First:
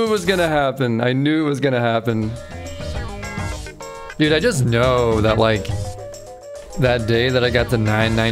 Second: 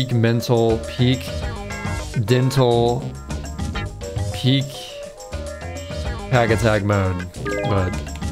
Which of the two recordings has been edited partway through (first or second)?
first